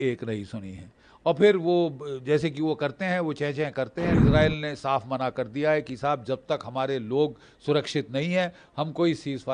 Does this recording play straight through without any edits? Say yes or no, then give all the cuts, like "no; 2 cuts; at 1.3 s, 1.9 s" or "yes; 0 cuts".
no; 1 cut; at 4.1 s